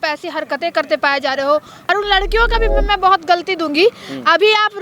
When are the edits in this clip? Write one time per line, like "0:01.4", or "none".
0:01.8

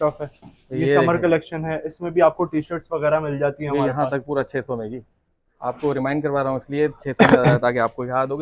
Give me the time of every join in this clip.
none

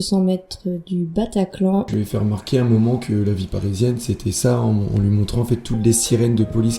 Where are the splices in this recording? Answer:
0:01.9

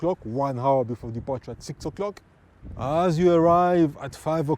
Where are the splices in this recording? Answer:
0:02.6

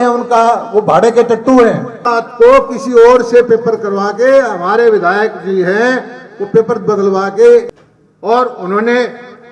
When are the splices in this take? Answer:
0:02.0
0:07.8

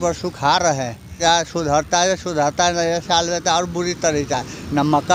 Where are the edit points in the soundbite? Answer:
0:01.2

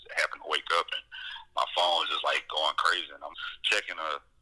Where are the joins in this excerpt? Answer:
0:03.4

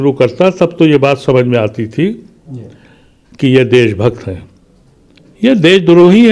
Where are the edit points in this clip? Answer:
none

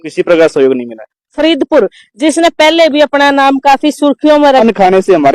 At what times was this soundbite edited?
0:01.4
0:04.6

